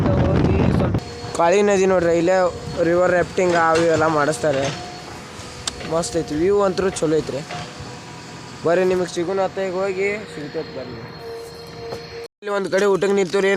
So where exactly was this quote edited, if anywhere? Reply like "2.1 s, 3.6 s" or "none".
1.0 s, 12.2 s